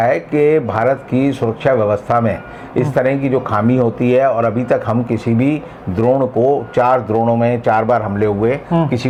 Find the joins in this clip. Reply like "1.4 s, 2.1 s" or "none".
none